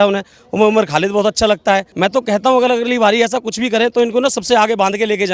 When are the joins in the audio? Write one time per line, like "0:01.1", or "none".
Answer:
0:01.9